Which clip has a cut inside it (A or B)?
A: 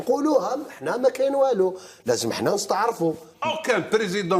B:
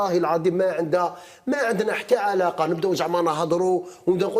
A